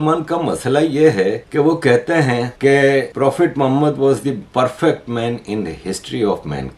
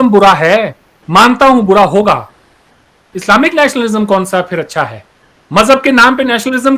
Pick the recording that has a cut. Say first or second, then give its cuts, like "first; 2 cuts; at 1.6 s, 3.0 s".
first; 3 cuts; at 1.4 s, 2.5 s, 3.1 s